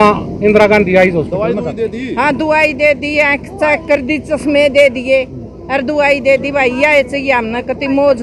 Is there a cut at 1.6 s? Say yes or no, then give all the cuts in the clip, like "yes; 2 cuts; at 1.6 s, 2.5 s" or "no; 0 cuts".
yes; 1 cut; at 1.6 s